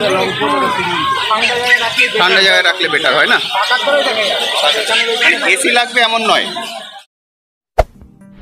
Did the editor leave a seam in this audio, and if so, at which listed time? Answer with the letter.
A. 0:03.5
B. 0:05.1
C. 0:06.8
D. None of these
C